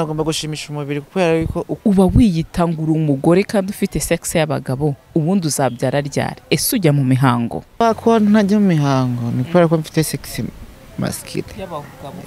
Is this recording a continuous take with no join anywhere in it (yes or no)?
no